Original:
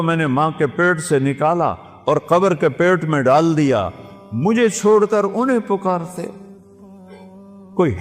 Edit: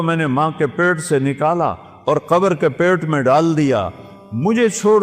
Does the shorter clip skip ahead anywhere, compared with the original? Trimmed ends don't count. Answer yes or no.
no